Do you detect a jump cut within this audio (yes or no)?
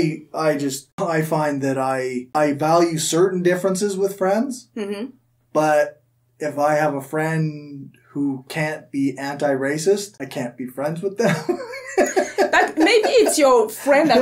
yes